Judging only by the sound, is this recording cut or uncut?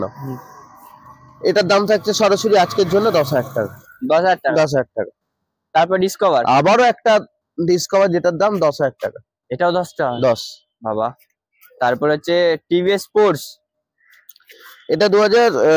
uncut